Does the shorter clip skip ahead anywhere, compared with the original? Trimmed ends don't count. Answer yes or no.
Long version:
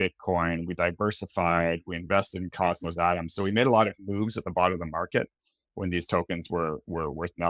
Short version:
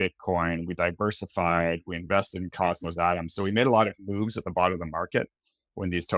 no